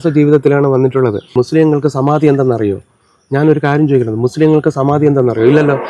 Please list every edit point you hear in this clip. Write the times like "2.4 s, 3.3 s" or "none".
1.2 s